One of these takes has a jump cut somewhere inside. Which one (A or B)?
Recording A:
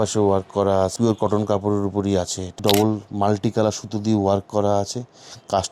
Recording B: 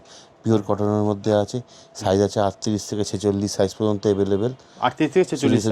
A